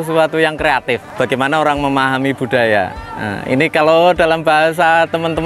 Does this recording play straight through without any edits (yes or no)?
no